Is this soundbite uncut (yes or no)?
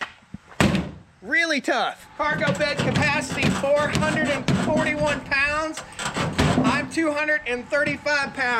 no